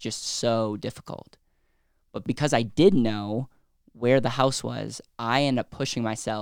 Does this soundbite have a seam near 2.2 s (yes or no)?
yes